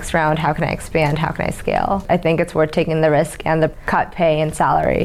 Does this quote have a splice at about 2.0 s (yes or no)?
yes